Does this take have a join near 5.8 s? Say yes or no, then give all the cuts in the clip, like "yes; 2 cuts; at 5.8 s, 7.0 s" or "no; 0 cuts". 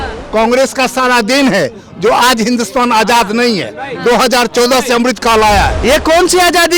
yes; 1 cut; at 5.8 s